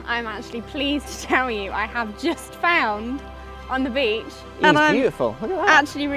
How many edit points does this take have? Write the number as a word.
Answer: one